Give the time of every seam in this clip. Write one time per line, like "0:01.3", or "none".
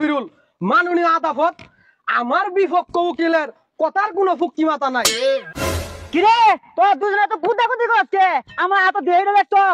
0:05.6